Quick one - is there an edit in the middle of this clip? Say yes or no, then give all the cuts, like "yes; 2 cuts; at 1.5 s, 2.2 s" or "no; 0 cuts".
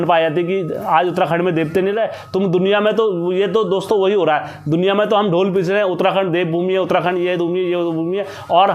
no; 0 cuts